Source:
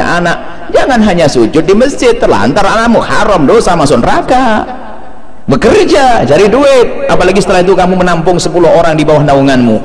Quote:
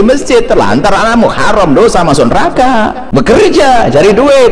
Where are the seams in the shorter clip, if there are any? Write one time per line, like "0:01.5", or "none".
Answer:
0:03.0